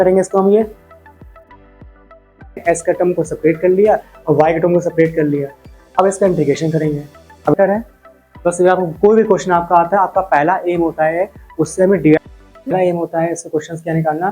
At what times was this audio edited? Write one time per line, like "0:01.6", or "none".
0:02.6
0:07.5
0:12.2